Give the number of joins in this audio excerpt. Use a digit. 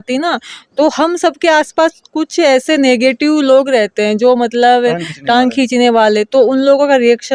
0